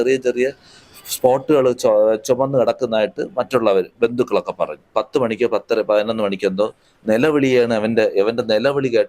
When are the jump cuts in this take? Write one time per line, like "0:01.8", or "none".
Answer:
0:04.9